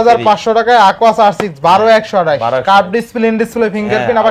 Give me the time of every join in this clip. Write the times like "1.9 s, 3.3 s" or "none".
none